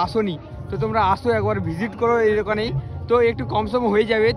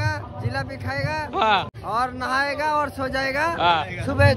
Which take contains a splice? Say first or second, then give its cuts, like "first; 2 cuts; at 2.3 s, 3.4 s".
second; 1 cut; at 1.8 s